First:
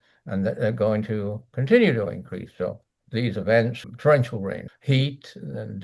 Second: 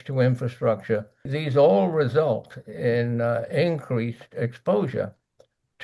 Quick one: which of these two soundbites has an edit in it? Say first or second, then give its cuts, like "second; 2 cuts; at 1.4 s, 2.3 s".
first; 2 cuts; at 3.8 s, 4.7 s